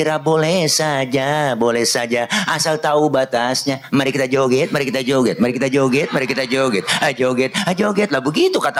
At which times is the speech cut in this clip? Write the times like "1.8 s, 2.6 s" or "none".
none